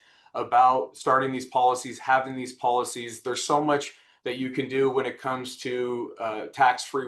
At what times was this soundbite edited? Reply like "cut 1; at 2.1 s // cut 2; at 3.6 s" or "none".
cut 1; at 0.9 s